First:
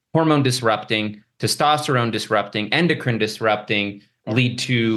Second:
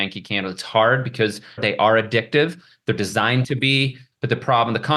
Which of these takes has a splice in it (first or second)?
second